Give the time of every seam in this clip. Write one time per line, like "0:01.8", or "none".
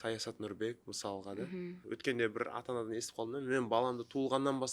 0:01.8